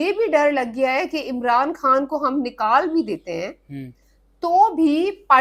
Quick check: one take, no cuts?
yes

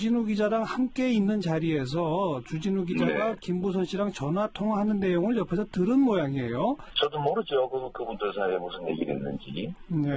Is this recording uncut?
no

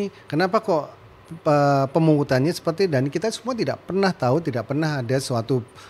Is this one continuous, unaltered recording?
yes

